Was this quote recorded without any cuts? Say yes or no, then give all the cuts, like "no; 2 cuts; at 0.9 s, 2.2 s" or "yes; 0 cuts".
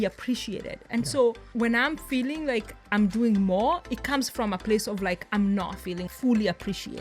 no; 1 cut; at 6.1 s